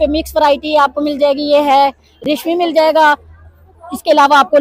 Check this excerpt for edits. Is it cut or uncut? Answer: uncut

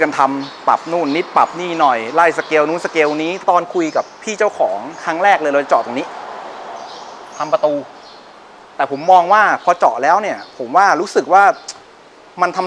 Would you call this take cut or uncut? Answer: cut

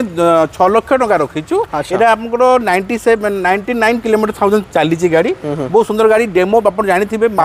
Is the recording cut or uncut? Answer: uncut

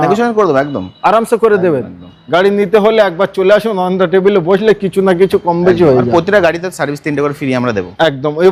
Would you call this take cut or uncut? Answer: uncut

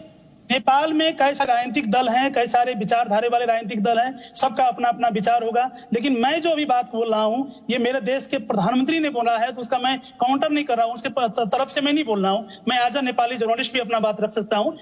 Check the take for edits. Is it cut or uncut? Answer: cut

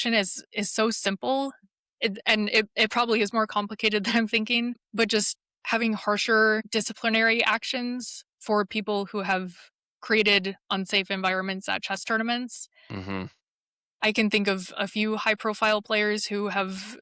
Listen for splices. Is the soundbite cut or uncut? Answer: cut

